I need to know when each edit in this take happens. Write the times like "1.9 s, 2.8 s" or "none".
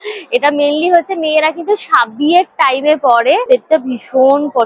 3.4 s

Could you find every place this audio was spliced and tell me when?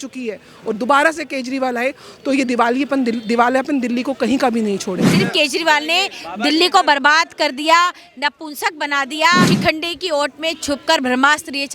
5.1 s, 9.5 s

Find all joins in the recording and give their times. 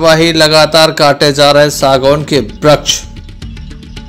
2.9 s

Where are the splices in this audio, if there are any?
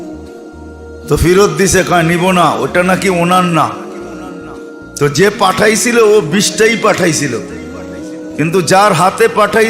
1.1 s

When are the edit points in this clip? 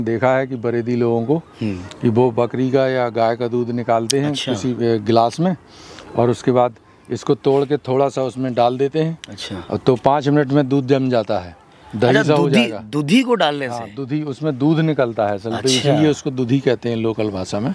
none

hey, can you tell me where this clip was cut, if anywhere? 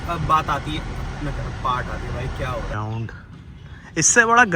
2.7 s

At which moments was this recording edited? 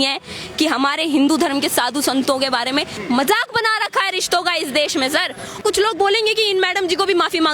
2.9 s, 5.5 s

